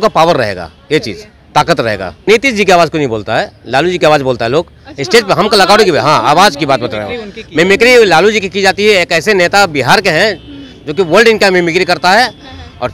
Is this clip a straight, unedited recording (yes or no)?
no